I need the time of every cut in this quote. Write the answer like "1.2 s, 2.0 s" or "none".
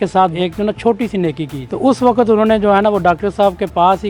1.7 s